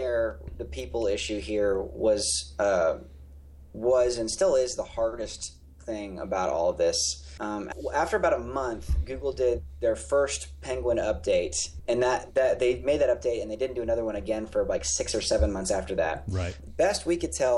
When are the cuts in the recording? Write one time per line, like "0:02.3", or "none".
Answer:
0:07.6
0:11.7
0:16.6